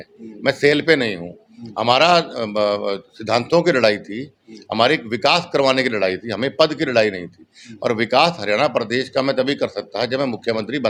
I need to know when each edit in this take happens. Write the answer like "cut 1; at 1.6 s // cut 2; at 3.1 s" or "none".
none